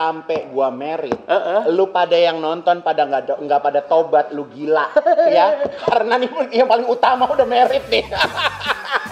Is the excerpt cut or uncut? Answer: uncut